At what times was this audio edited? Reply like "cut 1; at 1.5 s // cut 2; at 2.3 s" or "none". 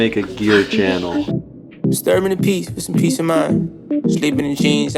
cut 1; at 1.7 s